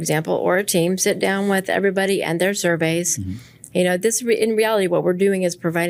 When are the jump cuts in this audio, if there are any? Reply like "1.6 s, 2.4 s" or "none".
none